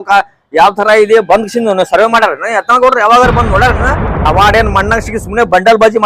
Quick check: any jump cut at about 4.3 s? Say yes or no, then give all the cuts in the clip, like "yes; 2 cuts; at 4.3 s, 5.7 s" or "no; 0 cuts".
yes; 1 cut; at 4.3 s